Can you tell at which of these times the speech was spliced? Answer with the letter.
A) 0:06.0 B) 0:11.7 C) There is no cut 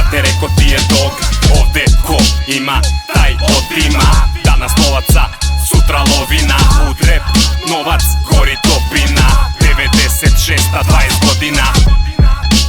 B